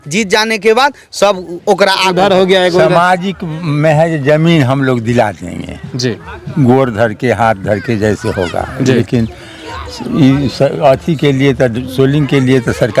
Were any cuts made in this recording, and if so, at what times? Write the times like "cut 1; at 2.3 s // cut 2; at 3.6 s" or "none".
cut 1; at 2.1 s